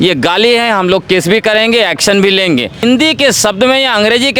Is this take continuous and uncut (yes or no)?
no